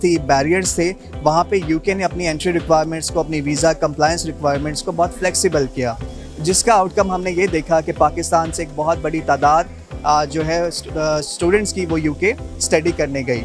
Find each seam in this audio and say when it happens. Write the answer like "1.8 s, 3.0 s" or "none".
none